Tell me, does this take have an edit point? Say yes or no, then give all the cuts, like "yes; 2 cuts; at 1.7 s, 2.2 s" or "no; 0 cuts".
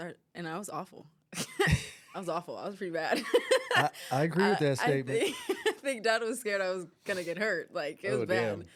no; 0 cuts